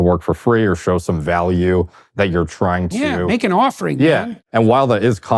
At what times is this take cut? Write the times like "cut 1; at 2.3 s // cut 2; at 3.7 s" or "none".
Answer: cut 1; at 4.3 s